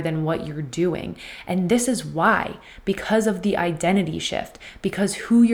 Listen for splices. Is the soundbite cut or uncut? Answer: uncut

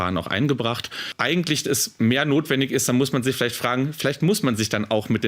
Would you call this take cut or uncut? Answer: cut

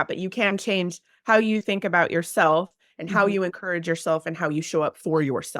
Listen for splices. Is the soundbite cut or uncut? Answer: uncut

